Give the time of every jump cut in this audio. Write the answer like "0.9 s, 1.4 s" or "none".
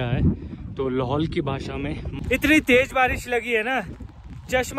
2.1 s